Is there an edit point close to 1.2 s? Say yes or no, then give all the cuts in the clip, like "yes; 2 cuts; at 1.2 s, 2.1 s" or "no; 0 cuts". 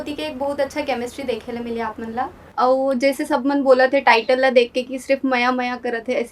no; 1 cut; at 2.4 s